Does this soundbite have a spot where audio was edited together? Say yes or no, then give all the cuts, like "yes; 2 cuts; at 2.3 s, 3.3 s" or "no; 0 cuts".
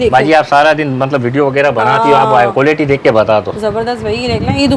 no; 0 cuts